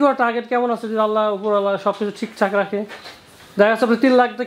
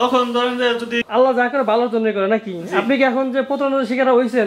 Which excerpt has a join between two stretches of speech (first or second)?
second